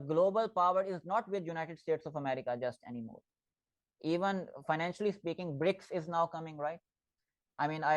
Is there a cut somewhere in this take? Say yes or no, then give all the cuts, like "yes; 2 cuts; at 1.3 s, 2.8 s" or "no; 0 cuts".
no; 0 cuts